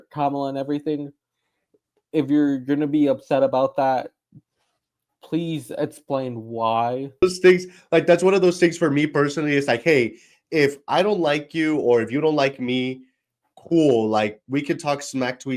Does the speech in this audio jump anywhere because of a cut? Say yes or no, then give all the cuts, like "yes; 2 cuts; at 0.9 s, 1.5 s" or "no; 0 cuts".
yes; 1 cut; at 7.2 s